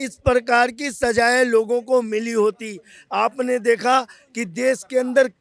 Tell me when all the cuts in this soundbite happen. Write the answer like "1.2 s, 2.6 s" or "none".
none